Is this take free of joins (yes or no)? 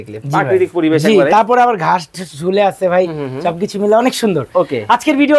yes